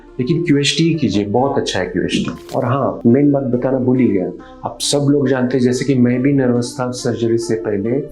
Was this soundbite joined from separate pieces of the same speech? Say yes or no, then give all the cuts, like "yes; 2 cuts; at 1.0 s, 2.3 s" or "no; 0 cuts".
yes; 1 cut; at 2.4 s